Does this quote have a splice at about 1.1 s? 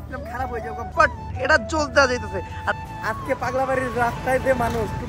no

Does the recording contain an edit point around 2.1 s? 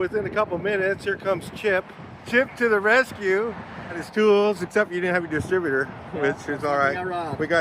yes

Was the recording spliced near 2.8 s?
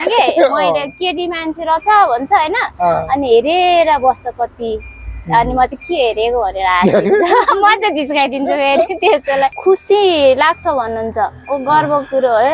no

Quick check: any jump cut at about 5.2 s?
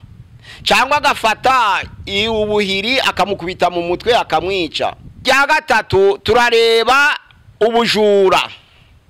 yes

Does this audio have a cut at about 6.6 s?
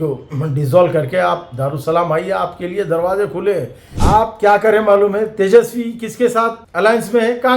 yes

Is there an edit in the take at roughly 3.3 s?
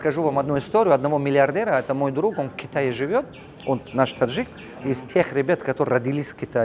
no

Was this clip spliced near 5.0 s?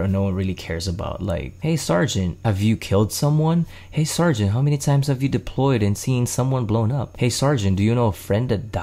no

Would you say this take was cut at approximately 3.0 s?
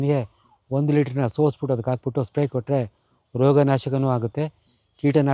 no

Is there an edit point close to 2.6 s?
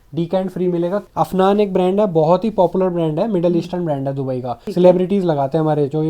no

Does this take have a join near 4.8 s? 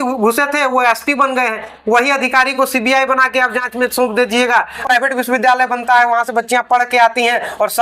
yes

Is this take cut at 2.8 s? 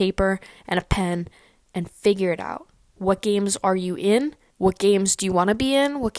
no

